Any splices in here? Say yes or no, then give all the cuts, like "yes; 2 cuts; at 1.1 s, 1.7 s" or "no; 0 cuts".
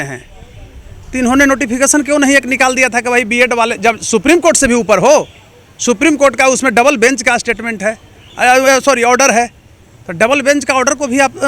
no; 0 cuts